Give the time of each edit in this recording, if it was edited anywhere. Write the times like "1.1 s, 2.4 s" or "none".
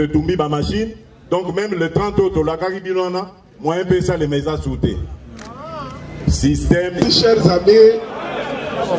7.0 s